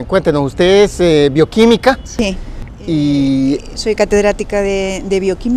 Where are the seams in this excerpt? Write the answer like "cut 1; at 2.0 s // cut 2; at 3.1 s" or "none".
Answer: cut 1; at 0.9 s